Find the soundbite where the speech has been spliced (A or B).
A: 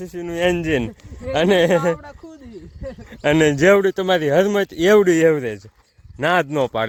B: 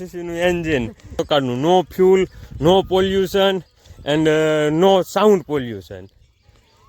B